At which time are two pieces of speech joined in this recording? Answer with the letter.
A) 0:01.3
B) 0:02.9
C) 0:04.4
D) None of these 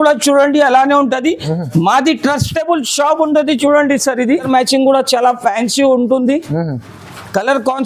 C